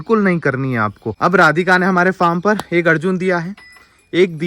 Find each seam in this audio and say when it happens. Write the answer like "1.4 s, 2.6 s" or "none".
1.0 s